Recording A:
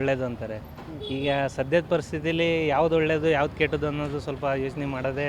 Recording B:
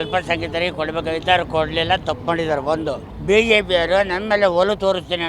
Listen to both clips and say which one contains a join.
B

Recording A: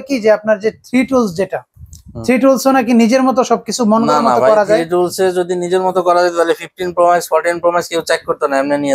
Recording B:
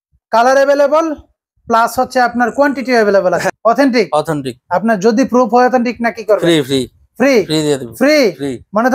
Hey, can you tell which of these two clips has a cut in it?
B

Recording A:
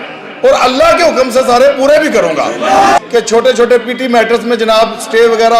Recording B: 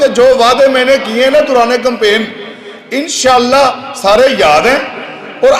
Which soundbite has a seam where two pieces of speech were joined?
A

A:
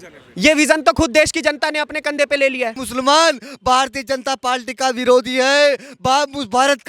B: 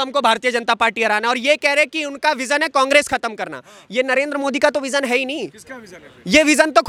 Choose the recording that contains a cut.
A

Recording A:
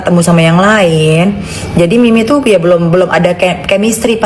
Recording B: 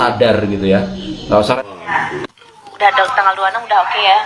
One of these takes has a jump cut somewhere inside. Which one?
B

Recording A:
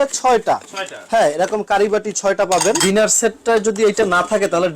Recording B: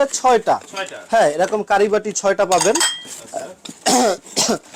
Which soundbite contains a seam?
A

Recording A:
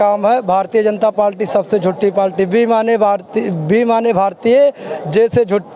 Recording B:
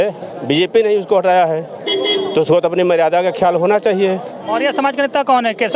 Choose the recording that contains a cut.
B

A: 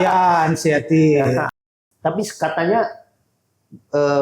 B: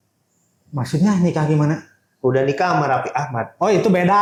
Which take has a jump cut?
A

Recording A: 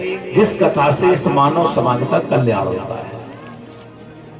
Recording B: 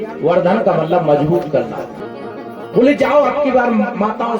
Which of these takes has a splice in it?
B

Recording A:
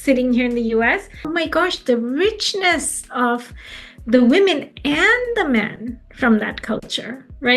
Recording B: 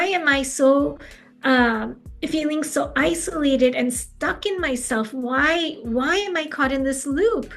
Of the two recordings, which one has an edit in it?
A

